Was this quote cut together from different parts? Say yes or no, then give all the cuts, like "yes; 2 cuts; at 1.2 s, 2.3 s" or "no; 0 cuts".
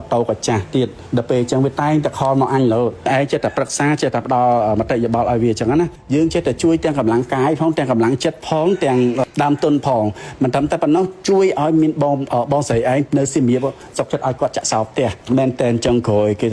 yes; 1 cut; at 15.2 s